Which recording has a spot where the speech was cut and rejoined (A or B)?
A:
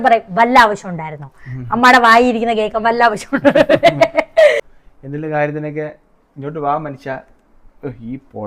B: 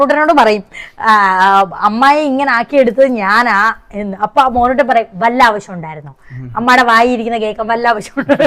A